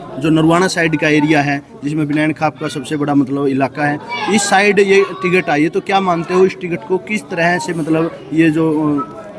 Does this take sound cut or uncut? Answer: uncut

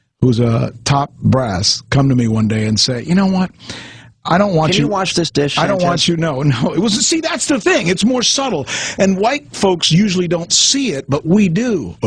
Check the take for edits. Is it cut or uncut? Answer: cut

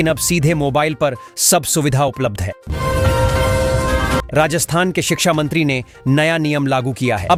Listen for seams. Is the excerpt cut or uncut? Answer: uncut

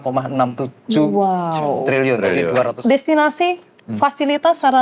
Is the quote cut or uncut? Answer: cut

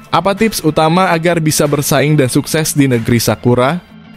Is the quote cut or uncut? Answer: uncut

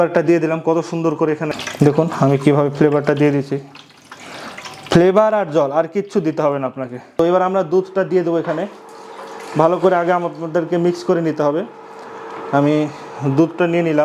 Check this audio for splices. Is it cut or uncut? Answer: cut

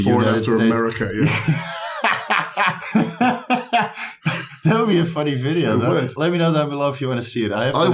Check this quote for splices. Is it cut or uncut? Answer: cut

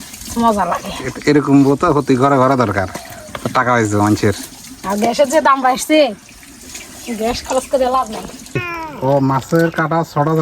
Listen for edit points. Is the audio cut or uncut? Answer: cut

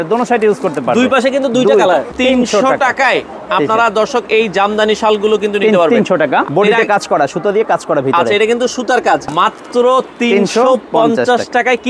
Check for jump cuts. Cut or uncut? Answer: cut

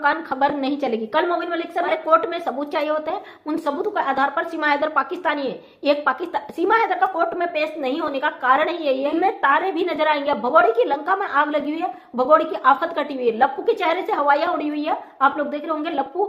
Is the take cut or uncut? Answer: cut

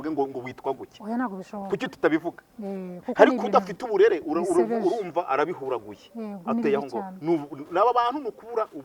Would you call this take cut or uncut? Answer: uncut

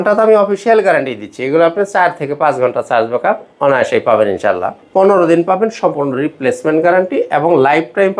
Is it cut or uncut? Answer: cut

